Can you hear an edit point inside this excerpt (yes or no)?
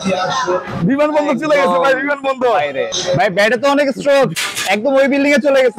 yes